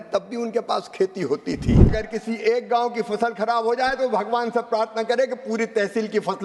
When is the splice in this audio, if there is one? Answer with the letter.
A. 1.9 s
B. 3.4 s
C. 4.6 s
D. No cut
A